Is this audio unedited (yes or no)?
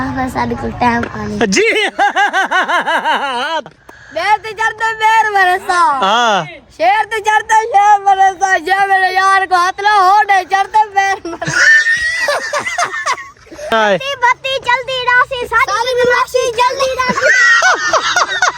no